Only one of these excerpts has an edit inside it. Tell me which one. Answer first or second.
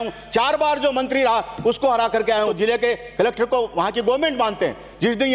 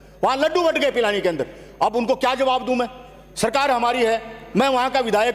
first